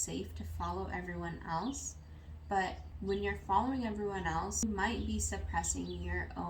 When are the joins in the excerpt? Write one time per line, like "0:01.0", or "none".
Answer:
0:02.9
0:04.6